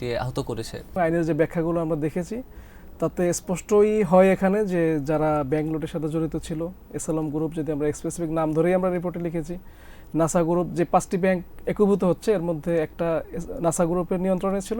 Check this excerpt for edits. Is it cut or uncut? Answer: cut